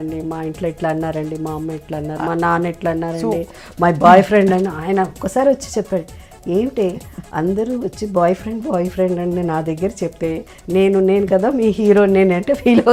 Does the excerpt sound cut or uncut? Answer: uncut